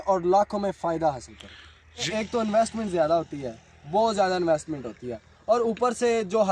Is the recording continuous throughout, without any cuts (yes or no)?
no